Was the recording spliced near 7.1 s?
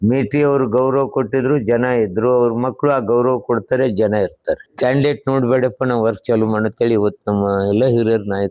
no; 1 cut; at 4.7 s

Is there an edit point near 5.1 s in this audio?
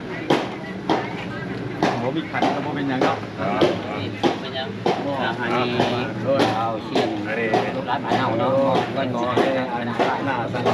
no; 0 cuts

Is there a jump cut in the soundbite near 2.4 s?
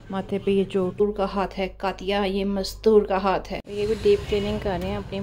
no; 2 cuts; at 1.0 s, 3.6 s

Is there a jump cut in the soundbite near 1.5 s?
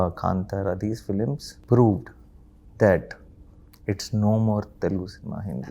yes; 1 cut; at 1.5 s

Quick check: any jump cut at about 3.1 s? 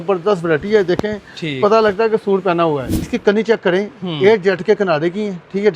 yes; 1 cut; at 3.1 s

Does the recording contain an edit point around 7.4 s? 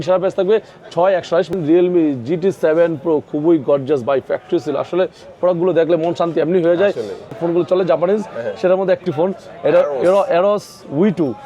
yes; 2 cuts; at 1.5 s, 7.4 s

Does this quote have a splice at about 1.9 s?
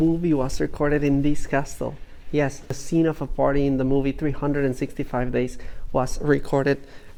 no; 0 cuts

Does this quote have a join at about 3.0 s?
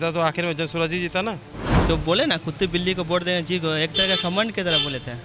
no; 1 cut; at 1.8 s

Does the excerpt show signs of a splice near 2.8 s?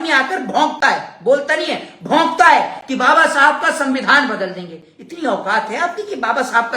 no; 0 cuts

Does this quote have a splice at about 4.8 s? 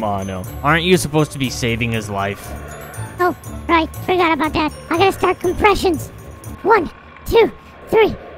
yes; 1 cut; at 4.8 s

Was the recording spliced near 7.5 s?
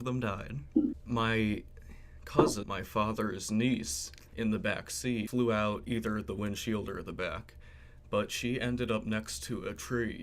no; 3 cuts; at 1.0 s, 2.6 s, 5.3 s

